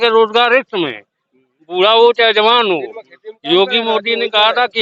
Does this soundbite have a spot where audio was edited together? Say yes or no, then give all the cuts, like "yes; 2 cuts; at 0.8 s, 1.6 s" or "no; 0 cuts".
no; 0 cuts